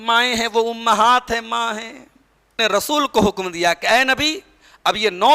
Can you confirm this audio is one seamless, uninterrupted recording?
no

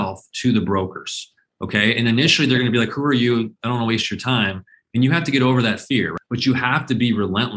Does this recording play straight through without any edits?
no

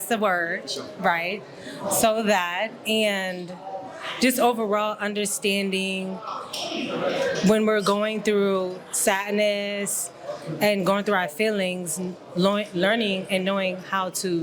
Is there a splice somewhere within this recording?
no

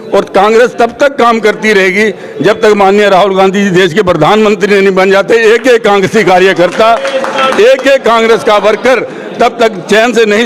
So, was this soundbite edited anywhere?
no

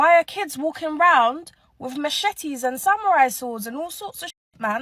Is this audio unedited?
yes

